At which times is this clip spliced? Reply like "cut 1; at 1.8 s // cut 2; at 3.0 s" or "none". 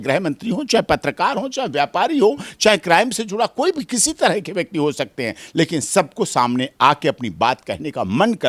none